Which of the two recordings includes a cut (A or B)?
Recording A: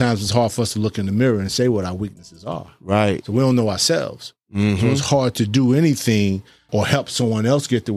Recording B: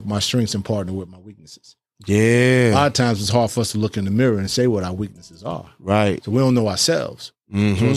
A